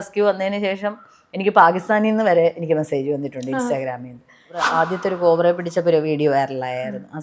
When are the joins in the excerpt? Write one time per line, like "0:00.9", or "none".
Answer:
0:04.7